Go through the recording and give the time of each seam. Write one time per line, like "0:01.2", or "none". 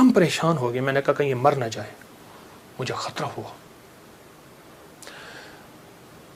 none